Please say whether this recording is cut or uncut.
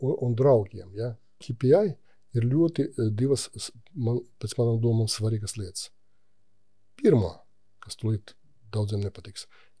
cut